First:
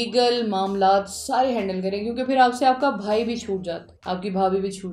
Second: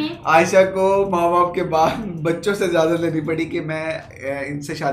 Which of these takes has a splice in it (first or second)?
first